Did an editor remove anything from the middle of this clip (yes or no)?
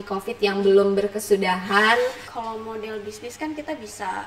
yes